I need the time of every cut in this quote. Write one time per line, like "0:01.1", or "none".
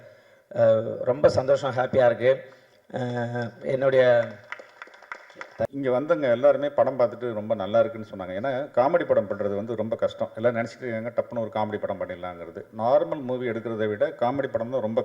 0:05.6

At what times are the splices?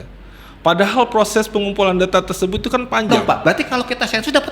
0:03.3

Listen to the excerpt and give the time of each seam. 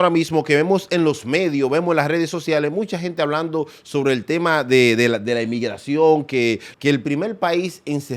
0:06.7

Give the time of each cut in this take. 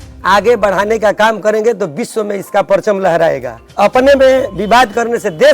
0:03.9

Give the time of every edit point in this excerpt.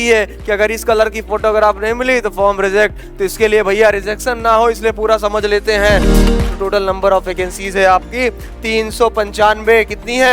0:06.3

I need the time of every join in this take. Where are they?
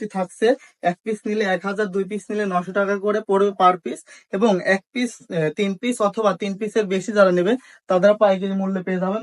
none

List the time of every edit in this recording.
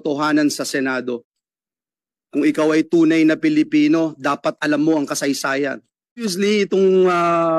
0:06.3

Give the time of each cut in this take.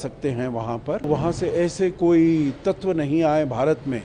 0:01.1

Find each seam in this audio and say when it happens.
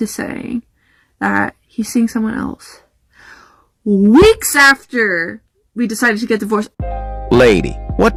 none

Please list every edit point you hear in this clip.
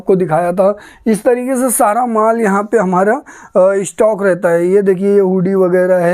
none

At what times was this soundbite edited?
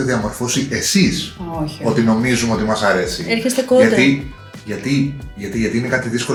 none

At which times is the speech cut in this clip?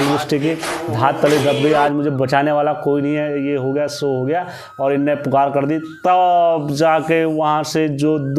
none

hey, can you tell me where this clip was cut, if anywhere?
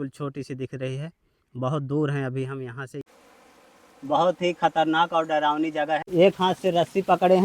0:03.0
0:06.0

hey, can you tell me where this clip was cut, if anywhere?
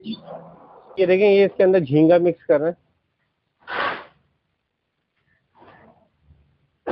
0:01.0

